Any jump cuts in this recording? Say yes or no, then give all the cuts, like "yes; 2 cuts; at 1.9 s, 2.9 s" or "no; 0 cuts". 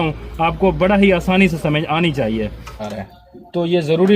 yes; 1 cut; at 2.9 s